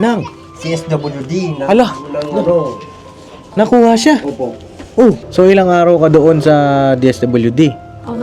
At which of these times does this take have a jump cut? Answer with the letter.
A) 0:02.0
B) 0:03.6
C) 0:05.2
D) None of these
C